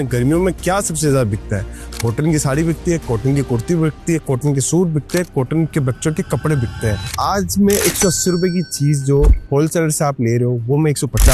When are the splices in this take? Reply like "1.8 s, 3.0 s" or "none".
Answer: 7.1 s